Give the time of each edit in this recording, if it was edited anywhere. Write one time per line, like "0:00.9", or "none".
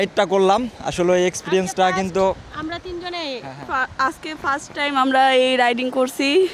none